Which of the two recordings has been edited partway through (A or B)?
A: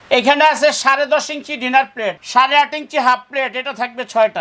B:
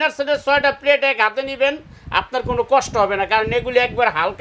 A